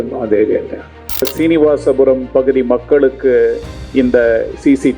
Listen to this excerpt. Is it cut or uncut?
cut